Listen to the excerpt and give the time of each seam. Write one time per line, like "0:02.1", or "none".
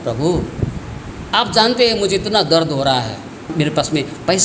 0:01.0
0:03.5